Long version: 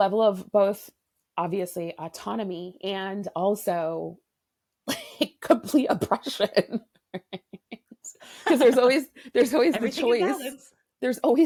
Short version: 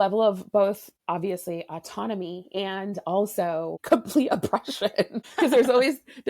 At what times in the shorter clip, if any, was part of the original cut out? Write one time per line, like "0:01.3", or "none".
0:00.9
0:03.8
0:05.2